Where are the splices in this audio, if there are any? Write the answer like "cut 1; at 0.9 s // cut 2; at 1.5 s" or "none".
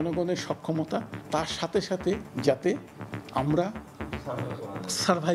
cut 1; at 1.2 s // cut 2; at 2.3 s

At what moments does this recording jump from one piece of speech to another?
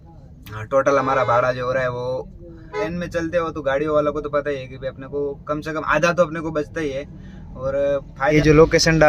cut 1; at 2.9 s // cut 2; at 8.3 s

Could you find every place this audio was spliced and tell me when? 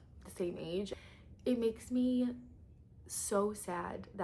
cut 1; at 0.9 s

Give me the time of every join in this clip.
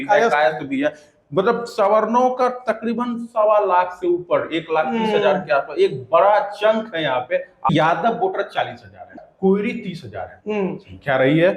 cut 1; at 7.7 s // cut 2; at 9.2 s

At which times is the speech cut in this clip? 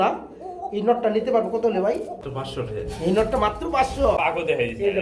cut 1; at 2.2 s // cut 2; at 4.2 s

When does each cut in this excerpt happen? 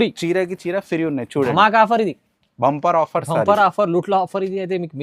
none

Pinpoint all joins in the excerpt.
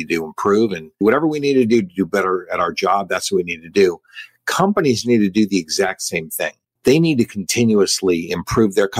cut 1; at 1.0 s // cut 2; at 6.6 s

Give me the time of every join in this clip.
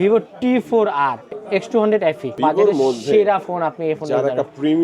cut 1; at 1.3 s // cut 2; at 2.4 s

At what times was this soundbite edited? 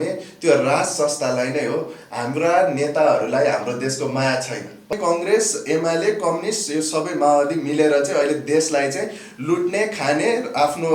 cut 1; at 4.9 s

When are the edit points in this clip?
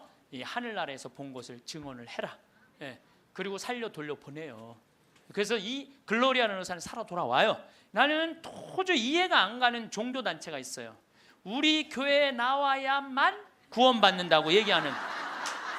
cut 1; at 7.7 s

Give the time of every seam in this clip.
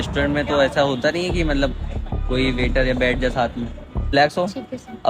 cut 1; at 4.1 s

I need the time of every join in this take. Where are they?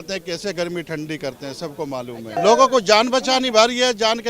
cut 1; at 2.4 s

